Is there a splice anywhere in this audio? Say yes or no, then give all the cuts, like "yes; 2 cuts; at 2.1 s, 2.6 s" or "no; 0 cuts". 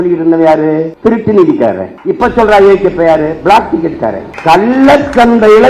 yes; 3 cuts; at 0.9 s, 1.9 s, 4.3 s